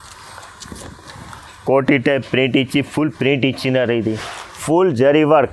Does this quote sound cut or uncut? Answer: cut